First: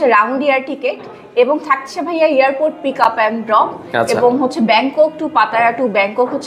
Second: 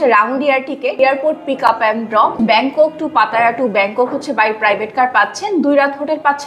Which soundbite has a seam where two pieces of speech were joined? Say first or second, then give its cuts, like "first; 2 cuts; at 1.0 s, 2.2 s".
second; 2 cuts; at 1.0 s, 2.3 s